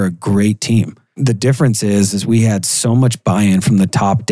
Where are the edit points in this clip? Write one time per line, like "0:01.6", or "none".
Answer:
0:01.0